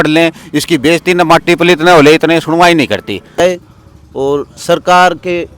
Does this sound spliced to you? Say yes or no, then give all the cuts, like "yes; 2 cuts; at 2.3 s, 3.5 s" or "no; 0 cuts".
yes; 1 cut; at 3.4 s